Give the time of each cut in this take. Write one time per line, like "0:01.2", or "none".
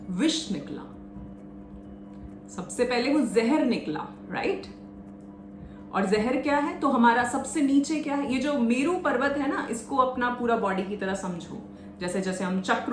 none